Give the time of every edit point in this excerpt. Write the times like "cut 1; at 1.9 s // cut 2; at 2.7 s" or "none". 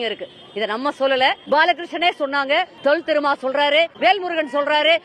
cut 1; at 1.4 s // cut 2; at 2.7 s // cut 3; at 3.9 s